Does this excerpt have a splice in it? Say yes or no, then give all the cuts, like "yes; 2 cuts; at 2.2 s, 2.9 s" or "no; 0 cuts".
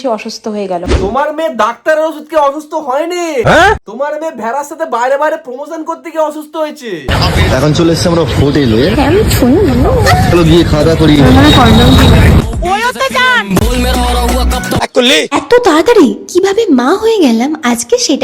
yes; 2 cuts; at 7.1 s, 14.8 s